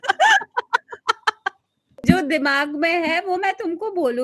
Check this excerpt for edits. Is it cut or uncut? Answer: cut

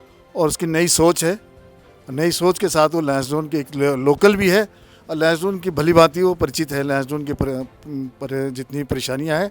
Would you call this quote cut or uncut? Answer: uncut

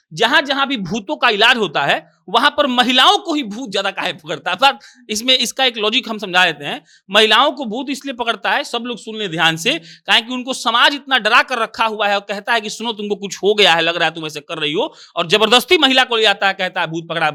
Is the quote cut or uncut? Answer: uncut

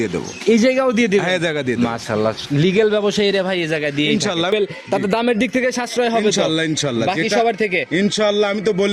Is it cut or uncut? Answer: cut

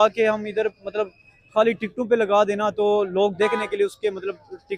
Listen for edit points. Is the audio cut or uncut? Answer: uncut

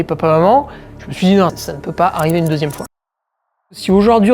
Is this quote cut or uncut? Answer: cut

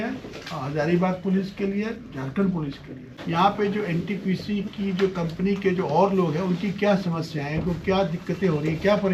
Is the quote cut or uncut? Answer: cut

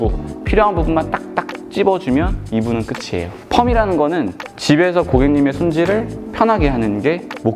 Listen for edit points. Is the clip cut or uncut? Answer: uncut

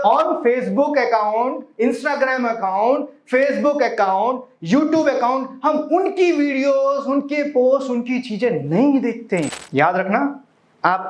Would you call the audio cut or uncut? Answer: cut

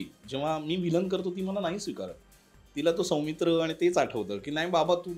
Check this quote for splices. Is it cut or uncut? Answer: uncut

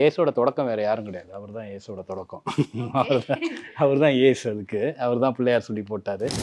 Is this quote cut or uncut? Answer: uncut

